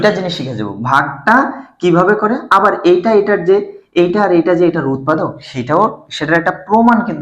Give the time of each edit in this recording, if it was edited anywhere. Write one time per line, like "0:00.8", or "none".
none